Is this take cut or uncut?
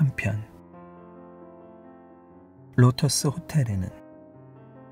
cut